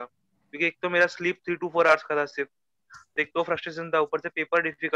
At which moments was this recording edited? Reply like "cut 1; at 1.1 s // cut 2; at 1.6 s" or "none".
none